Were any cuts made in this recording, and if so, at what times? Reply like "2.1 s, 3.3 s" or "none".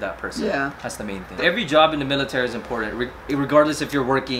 1.4 s

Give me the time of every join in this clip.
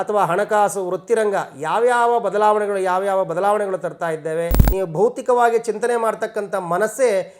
4.6 s

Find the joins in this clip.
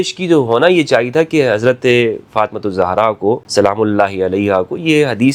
3.4 s

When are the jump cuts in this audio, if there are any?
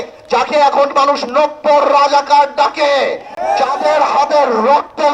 none

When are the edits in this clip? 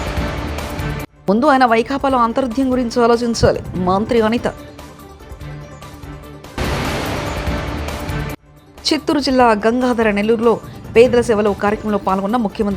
1.1 s

